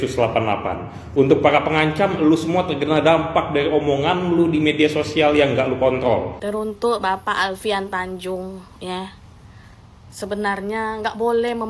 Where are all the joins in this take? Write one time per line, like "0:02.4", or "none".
0:06.4